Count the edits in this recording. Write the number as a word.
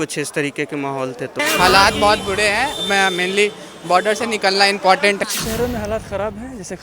two